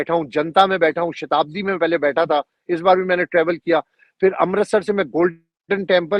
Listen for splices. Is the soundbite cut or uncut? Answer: uncut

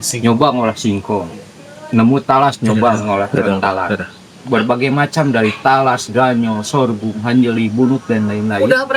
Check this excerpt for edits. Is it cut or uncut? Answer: uncut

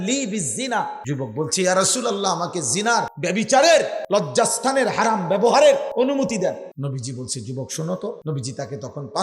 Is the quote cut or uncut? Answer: cut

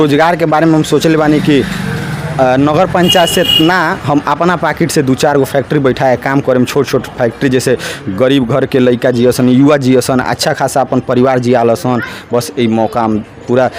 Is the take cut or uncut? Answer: uncut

